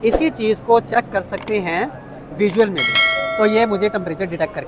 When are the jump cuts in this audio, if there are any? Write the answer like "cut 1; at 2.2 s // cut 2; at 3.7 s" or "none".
cut 1; at 3.0 s